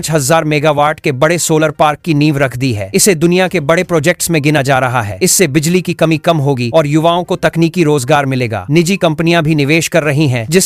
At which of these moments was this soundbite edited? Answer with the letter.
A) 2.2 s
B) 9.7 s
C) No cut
C